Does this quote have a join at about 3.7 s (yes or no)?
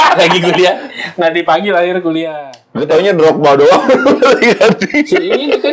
no